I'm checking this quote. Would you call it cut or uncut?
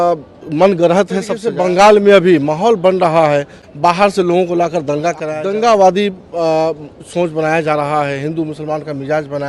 cut